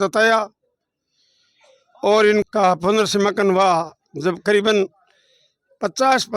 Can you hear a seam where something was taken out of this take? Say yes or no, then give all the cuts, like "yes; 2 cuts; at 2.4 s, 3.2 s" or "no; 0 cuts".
yes; 1 cut; at 2.5 s